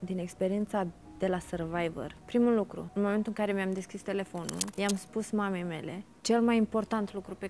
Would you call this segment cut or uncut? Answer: cut